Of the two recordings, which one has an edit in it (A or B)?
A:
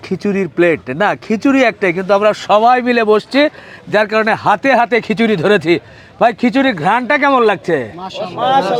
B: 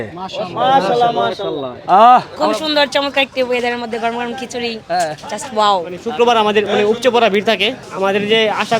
B